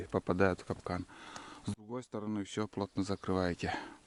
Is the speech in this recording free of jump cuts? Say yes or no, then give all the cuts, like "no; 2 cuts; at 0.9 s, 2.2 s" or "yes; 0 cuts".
yes; 0 cuts